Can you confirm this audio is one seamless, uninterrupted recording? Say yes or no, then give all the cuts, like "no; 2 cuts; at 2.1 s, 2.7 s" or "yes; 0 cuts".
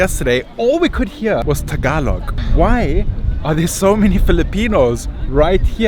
no; 2 cuts; at 1.4 s, 2.4 s